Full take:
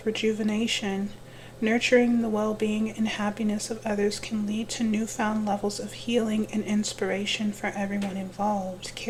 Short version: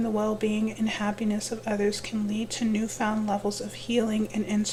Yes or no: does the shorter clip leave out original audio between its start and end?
no